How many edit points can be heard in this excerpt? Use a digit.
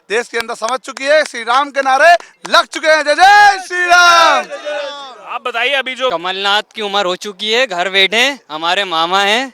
1